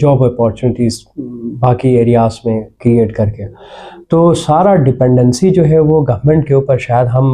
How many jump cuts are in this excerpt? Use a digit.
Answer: 0